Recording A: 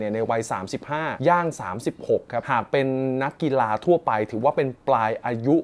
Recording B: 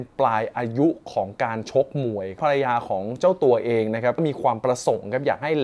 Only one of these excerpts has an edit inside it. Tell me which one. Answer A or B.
B